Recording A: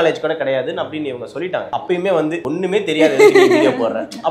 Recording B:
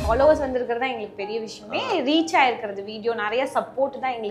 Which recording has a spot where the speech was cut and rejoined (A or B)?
A